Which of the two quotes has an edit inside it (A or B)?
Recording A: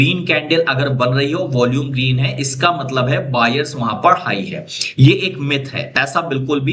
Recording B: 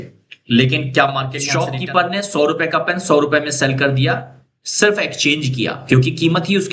B